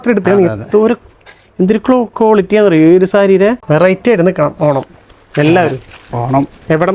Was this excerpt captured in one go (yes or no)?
no